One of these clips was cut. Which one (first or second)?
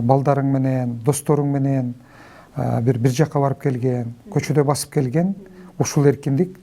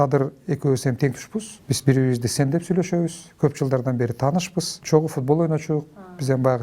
second